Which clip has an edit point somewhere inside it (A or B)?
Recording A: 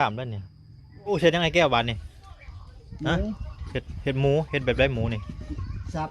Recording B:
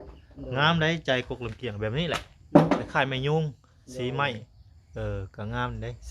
A